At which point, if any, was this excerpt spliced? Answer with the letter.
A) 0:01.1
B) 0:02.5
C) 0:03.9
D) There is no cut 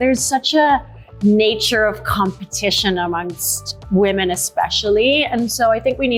D